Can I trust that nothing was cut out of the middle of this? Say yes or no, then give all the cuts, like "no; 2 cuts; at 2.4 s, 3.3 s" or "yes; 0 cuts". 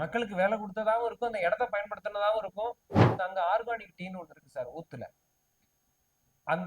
no; 1 cut; at 3.1 s